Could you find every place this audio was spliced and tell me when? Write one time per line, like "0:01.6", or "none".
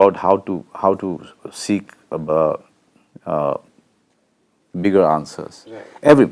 none